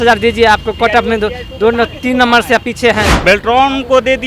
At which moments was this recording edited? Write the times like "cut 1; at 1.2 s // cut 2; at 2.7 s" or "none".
cut 1; at 3.1 s